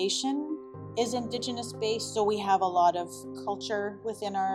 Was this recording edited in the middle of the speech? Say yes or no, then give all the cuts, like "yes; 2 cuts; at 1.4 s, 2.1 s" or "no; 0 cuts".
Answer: no; 0 cuts